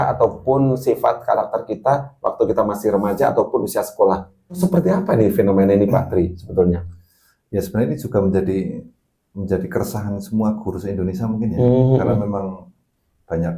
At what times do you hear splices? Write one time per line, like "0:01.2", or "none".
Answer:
0:04.4